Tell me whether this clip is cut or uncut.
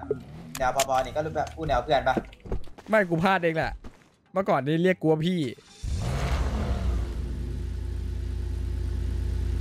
uncut